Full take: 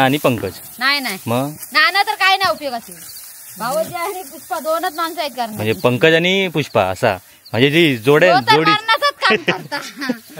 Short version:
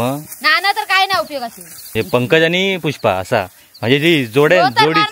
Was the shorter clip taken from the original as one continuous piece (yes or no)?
no